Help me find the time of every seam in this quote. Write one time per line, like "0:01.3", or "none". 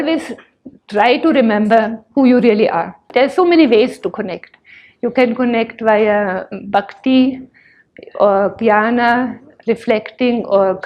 0:03.1